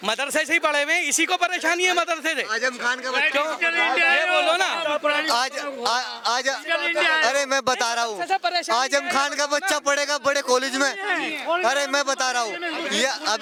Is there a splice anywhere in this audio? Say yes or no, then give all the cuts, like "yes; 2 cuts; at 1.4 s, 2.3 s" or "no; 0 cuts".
no; 0 cuts